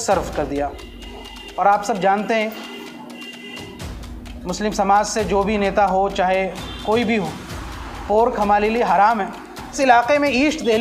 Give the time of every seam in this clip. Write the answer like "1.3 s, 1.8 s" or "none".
9.8 s